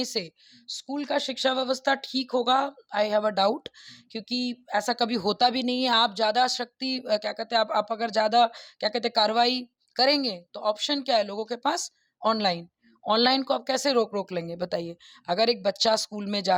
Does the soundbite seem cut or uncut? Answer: uncut